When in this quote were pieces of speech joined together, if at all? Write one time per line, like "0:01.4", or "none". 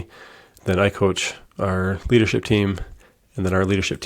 none